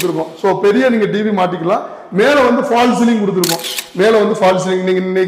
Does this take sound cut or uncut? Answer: uncut